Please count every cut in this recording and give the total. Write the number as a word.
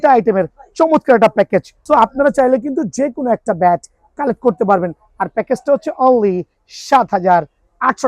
one